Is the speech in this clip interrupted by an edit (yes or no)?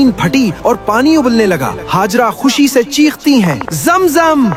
no